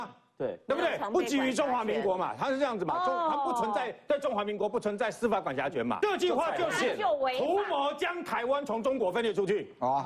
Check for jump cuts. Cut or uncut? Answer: cut